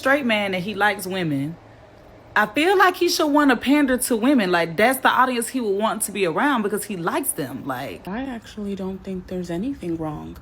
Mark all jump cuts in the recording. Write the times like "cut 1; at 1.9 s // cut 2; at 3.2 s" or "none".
cut 1; at 8.0 s